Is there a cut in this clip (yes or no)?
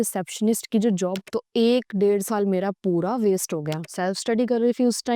yes